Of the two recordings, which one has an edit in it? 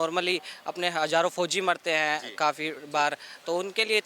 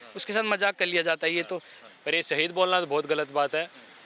second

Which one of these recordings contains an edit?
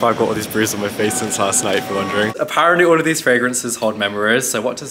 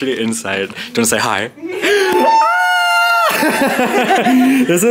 first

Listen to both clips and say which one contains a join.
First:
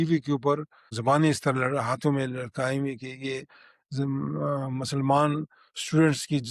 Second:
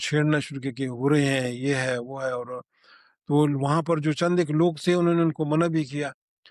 first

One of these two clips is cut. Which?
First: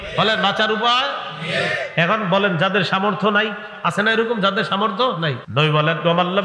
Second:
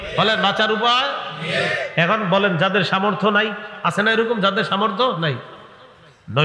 first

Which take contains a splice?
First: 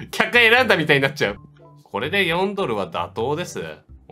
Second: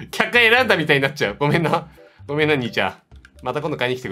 first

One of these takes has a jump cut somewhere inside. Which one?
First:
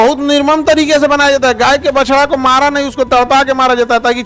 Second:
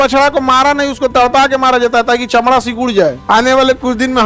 second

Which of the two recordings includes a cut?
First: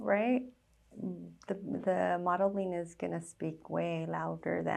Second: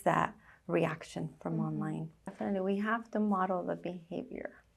second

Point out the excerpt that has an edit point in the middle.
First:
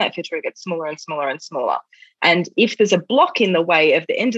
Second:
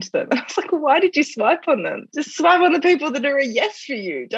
second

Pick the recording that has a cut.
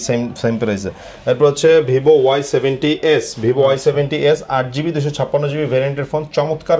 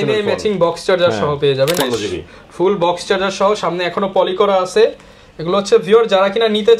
second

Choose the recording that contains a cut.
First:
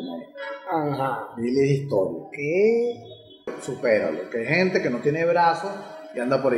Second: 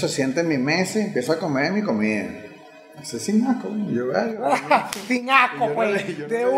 first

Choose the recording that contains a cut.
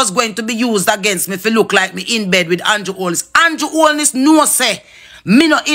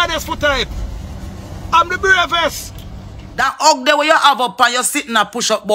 second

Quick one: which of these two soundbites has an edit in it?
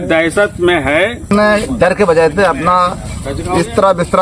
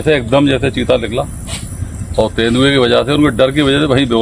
first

